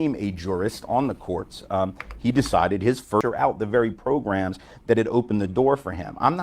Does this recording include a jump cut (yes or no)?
yes